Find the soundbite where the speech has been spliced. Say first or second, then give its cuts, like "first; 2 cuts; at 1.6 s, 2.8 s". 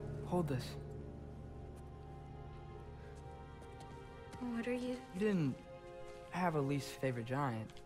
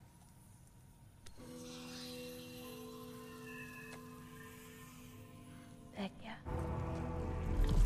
second; 1 cut; at 6.5 s